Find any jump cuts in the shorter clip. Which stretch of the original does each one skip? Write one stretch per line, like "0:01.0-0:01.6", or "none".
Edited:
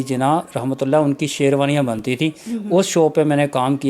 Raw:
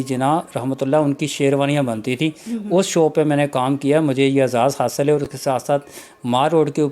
none